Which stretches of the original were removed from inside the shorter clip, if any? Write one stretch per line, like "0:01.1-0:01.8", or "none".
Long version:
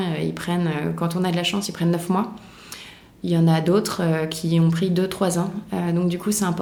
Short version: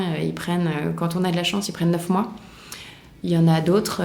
none